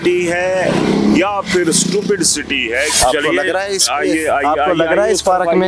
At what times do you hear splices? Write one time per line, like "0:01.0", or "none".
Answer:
0:02.9